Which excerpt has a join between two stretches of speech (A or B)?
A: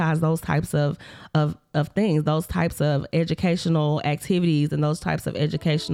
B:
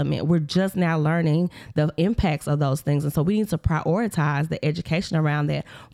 B